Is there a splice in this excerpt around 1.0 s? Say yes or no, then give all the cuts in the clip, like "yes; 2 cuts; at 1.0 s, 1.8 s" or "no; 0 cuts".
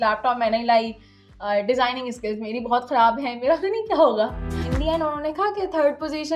no; 1 cut; at 4.7 s